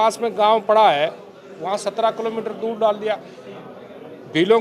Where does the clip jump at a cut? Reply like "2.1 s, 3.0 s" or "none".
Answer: none